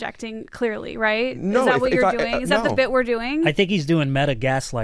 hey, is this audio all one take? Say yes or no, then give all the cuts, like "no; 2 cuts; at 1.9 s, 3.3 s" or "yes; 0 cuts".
yes; 0 cuts